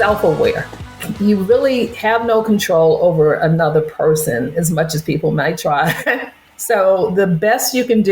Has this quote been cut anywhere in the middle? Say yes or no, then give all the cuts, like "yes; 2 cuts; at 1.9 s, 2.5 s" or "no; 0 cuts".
yes; 2 cuts; at 0.9 s, 6.5 s